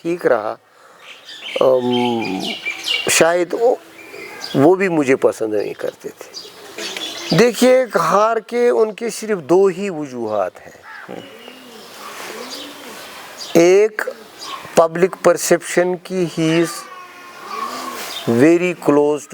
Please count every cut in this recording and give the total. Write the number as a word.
one